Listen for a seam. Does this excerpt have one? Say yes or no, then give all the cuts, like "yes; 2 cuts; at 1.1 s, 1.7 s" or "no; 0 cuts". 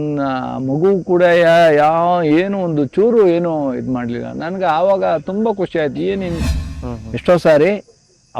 yes; 1 cut; at 6.4 s